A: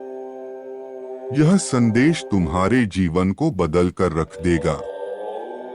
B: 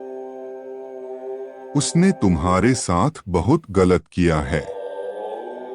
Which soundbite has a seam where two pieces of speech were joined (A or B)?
A